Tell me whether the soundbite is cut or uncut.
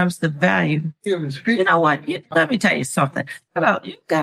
uncut